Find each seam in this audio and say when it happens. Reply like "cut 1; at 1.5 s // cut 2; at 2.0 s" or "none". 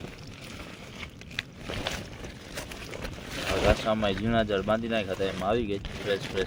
none